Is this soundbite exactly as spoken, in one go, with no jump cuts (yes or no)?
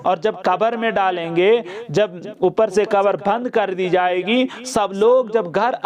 yes